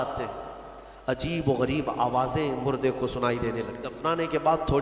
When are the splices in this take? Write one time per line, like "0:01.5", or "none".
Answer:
0:03.9